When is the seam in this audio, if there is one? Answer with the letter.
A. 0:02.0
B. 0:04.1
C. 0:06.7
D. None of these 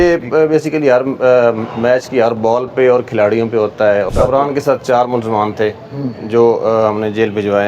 B